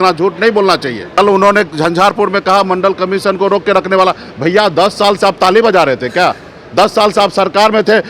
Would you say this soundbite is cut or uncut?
cut